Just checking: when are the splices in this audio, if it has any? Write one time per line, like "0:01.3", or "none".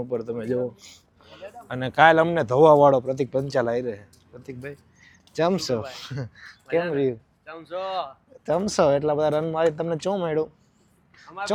none